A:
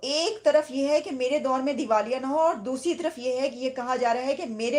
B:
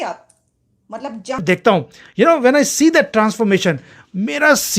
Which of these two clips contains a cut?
B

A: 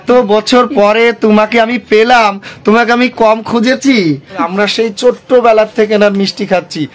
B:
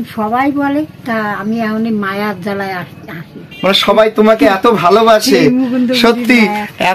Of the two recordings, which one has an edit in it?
A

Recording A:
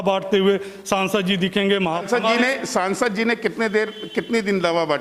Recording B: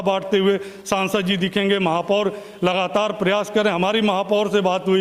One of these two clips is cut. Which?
A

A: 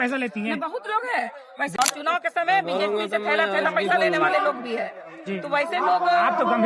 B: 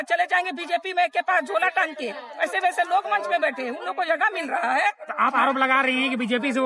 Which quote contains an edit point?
A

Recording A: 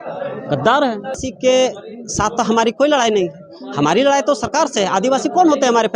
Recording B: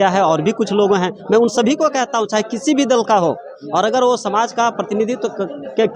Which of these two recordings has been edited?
A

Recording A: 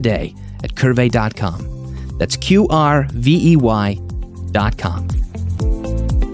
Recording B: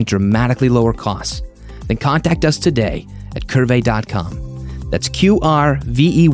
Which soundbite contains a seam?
A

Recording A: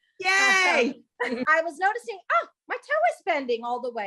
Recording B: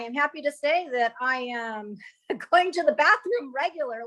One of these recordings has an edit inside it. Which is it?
A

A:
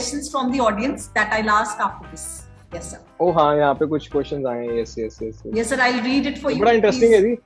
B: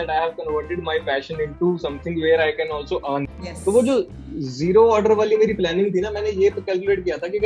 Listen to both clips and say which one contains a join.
B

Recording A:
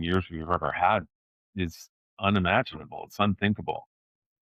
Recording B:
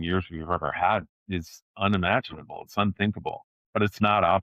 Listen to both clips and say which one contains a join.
B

